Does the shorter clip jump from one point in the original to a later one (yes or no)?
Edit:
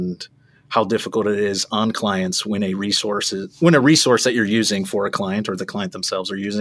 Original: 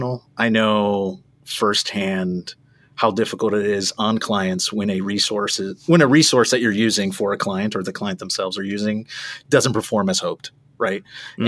no